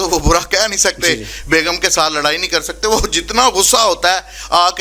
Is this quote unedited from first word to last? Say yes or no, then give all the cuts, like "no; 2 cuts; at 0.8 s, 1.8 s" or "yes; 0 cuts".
yes; 0 cuts